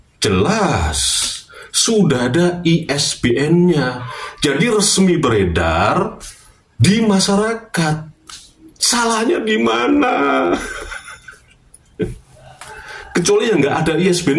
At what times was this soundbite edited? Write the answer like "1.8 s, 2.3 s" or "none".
none